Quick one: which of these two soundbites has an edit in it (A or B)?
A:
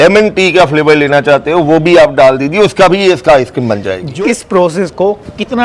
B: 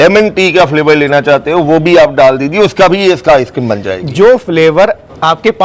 A